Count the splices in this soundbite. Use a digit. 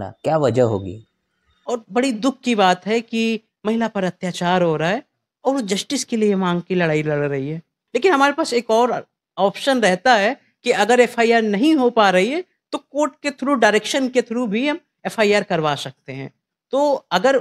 2